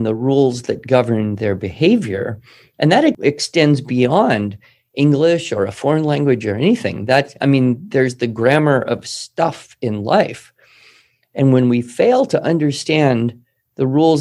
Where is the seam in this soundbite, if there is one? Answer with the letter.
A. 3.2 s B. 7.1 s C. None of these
A